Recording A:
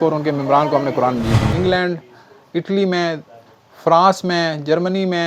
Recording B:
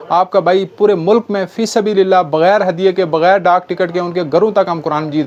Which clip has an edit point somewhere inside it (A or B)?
A